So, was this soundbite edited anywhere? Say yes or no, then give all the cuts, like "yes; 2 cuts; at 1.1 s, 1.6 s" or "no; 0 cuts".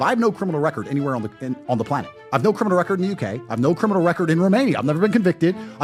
no; 0 cuts